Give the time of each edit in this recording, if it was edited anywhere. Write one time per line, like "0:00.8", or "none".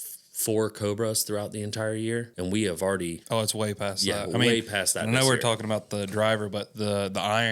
0:02.3
0:03.2